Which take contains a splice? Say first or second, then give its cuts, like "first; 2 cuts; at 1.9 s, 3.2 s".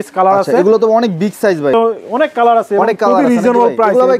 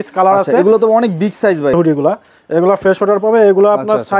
second; 1 cut; at 1.7 s